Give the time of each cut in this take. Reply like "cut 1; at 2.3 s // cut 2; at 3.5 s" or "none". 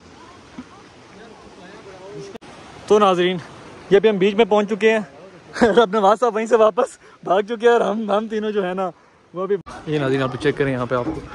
cut 1; at 2.3 s // cut 2; at 9.6 s